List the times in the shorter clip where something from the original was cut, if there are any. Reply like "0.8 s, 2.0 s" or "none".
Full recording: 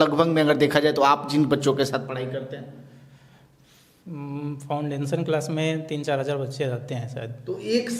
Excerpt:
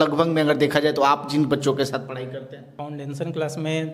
2.7 s